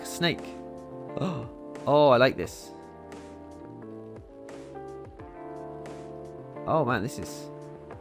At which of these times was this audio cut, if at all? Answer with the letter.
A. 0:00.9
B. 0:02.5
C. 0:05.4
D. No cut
B